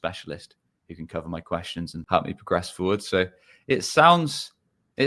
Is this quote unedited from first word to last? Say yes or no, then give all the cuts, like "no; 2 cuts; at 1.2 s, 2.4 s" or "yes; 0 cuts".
no; 1 cut; at 2.0 s